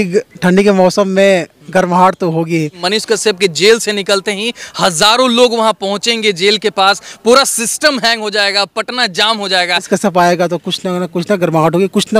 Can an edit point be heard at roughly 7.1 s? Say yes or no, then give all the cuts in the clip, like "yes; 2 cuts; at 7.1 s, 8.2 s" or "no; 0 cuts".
no; 2 cuts; at 2.8 s, 9.9 s